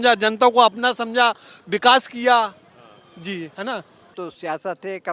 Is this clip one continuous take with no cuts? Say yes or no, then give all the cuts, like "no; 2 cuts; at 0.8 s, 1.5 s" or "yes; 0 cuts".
no; 1 cut; at 4.1 s